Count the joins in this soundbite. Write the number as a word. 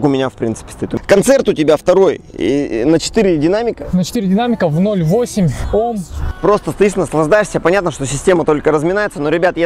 two